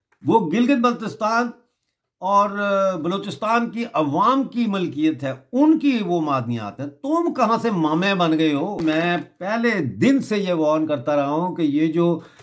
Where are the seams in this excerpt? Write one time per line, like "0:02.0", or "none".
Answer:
0:08.8

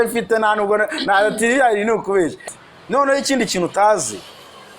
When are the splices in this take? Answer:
0:02.4

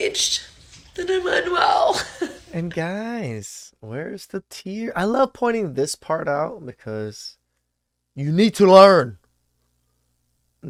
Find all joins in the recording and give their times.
none

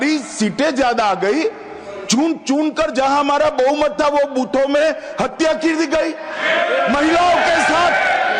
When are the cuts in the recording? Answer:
none

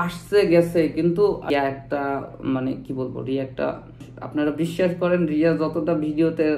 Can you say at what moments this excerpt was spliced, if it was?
0:01.5
0:04.1

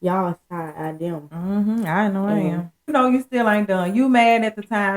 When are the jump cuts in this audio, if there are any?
0:02.9

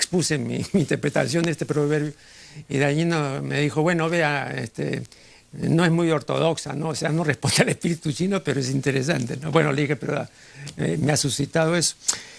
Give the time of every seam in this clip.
0:01.7

